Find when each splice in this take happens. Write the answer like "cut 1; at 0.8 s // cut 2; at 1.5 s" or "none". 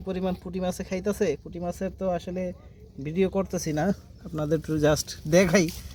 none